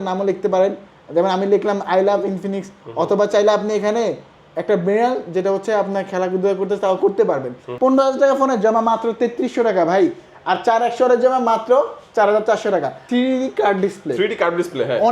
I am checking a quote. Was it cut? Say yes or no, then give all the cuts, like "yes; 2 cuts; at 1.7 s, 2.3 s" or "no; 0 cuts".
yes; 2 cuts; at 7.7 s, 13.0 s